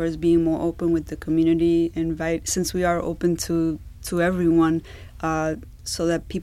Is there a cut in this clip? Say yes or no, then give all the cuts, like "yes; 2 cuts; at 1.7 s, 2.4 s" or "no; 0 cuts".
no; 0 cuts